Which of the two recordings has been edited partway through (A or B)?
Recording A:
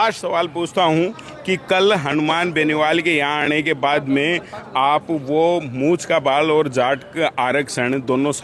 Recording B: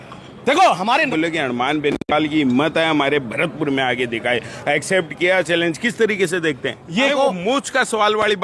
B